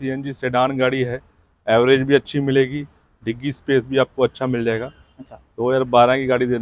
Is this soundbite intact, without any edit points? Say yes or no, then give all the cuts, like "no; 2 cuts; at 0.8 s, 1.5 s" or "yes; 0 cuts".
yes; 0 cuts